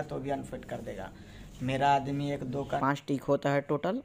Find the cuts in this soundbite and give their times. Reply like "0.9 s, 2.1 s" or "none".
2.8 s